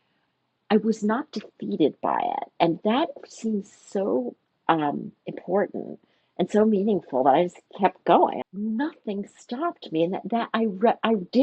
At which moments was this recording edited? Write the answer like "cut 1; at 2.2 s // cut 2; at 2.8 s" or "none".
cut 1; at 8.4 s